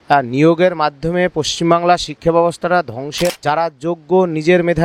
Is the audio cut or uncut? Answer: cut